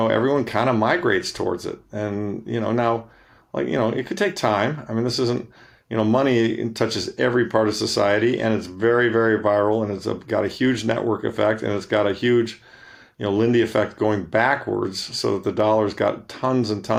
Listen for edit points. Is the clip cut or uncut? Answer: uncut